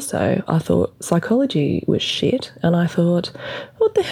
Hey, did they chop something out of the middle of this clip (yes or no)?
no